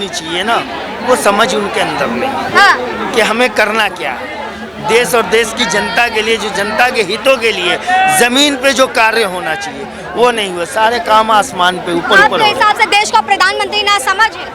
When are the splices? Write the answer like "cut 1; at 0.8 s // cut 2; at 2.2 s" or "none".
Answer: none